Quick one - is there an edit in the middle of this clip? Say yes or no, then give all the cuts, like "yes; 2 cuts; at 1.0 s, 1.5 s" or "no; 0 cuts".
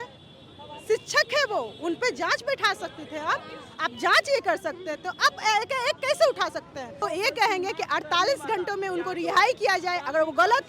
yes; 1 cut; at 7.0 s